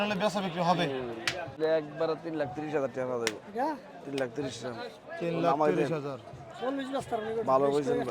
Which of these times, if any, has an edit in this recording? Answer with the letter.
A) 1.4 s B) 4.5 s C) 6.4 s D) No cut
A